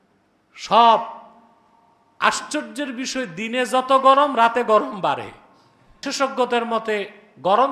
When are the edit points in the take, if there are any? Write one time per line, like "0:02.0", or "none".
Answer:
0:05.9